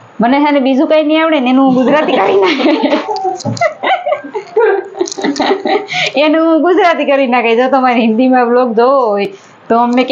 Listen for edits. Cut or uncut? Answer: uncut